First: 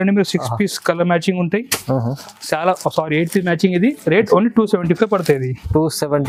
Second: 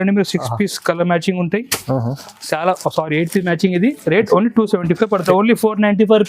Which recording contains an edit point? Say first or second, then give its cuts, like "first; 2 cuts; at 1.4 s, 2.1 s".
second; 1 cut; at 5.2 s